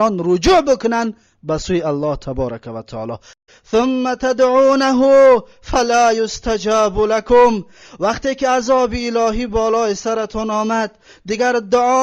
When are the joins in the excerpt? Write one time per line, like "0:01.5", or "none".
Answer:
0:03.3